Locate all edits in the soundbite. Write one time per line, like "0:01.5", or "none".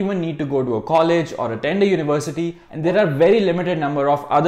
0:02.6